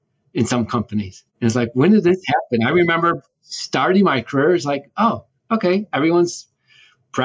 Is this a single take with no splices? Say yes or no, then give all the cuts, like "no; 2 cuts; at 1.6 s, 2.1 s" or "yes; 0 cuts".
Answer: no; 1 cut; at 1.2 s